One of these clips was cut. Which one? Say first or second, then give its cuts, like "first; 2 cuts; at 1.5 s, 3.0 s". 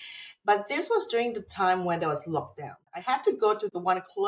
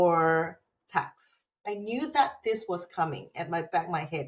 first; 1 cut; at 2.9 s